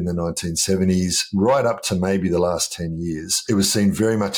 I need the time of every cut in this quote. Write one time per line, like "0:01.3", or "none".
0:03.4

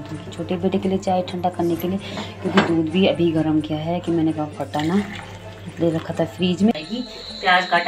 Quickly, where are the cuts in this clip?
0:06.7

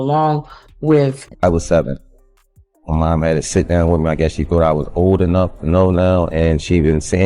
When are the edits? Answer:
0:01.2

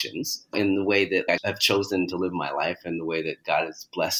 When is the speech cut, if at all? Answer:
none

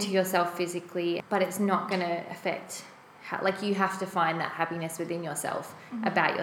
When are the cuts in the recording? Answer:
0:01.2

